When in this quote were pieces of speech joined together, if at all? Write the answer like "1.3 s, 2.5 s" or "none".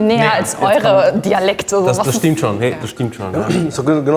none